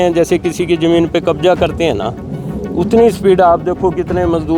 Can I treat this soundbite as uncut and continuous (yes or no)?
yes